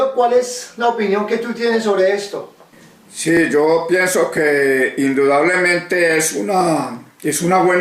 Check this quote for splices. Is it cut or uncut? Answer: uncut